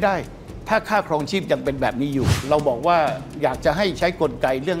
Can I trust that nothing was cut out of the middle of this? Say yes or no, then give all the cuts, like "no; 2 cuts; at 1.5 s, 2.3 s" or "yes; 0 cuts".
no; 1 cut; at 2.4 s